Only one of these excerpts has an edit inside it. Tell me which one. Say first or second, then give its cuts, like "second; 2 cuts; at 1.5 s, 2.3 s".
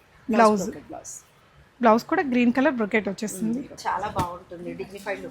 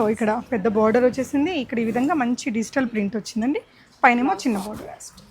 first; 1 cut; at 3.7 s